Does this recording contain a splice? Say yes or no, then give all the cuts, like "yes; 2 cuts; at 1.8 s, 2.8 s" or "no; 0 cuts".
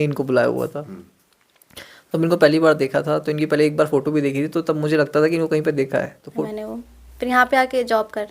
yes; 1 cut; at 6.4 s